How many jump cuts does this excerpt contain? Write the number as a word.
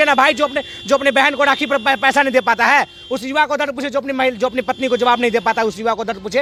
zero